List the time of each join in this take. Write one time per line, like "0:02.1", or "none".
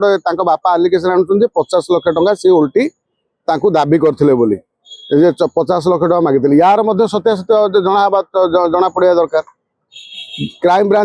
none